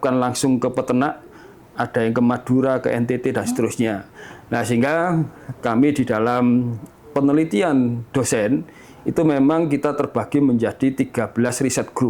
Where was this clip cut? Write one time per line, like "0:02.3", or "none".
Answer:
none